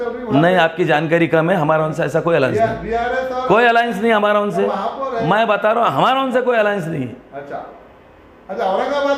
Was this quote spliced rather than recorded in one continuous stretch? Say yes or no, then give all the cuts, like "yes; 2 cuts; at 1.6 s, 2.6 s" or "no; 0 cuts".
no; 0 cuts